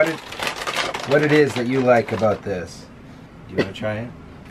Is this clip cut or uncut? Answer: uncut